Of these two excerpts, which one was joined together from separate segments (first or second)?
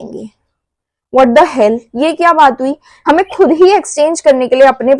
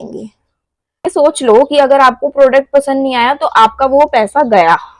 second